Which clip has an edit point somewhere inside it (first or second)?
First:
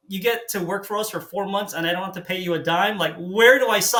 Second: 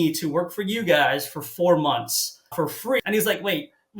second